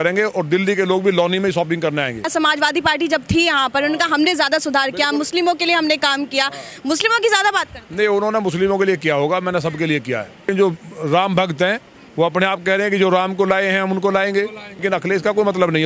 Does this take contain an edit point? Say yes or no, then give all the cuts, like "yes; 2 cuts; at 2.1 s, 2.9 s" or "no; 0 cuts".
yes; 3 cuts; at 2.3 s, 10.5 s, 14.8 s